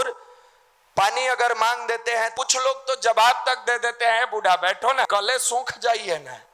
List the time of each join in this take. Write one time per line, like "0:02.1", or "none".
0:02.3
0:05.1